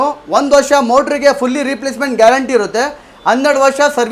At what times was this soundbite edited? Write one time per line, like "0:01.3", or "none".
none